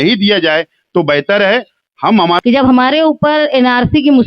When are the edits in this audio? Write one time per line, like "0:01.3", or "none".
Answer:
0:02.4